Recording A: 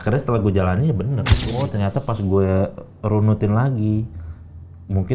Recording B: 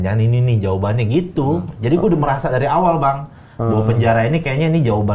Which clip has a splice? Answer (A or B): A